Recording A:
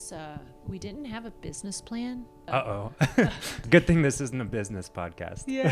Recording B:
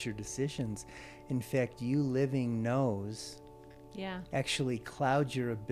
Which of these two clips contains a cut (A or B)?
A